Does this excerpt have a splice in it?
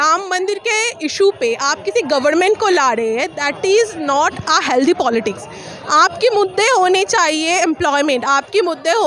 no; 0 cuts

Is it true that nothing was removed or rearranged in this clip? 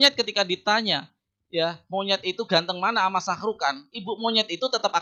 yes; 0 cuts

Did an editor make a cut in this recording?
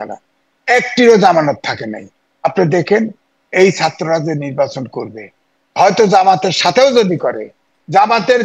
no; 0 cuts

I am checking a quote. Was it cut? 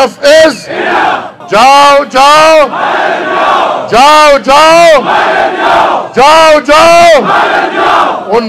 yes; 1 cut; at 1.3 s

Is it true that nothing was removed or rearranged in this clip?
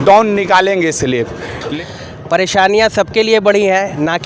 no; 1 cut; at 1.7 s

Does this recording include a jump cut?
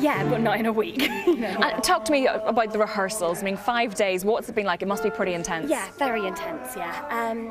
no; 0 cuts

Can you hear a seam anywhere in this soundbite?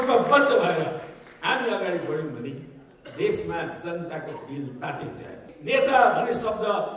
yes; 1 cut; at 5.5 s

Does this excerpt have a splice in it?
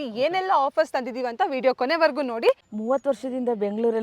yes; 1 cut; at 2.6 s

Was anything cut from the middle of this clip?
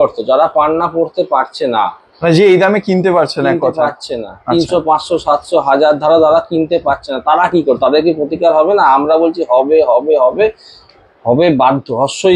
no; 0 cuts

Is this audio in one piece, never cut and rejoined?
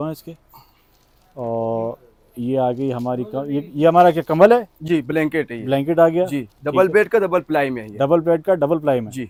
yes; 0 cuts

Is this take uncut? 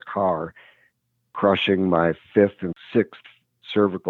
no; 1 cut; at 2.7 s

